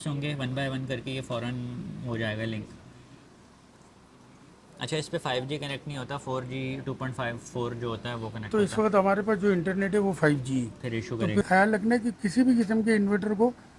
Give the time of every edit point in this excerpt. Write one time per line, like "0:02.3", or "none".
none